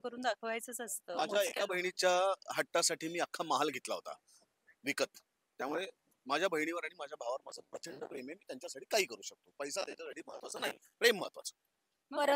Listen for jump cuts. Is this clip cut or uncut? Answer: uncut